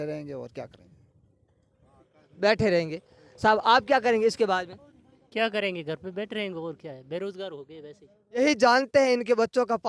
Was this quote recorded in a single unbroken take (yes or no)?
no